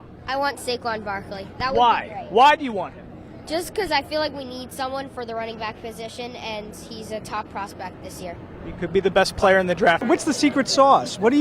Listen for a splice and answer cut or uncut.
cut